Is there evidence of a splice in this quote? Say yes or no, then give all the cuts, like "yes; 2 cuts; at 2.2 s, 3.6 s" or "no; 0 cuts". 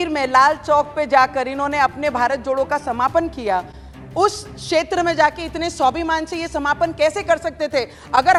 no; 0 cuts